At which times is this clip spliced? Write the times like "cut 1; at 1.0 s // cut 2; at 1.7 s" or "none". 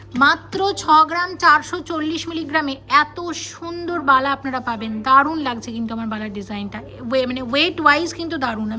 none